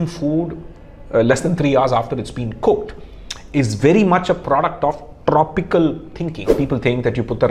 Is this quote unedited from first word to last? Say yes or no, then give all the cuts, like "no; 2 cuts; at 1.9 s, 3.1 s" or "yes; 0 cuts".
no; 1 cut; at 6.5 s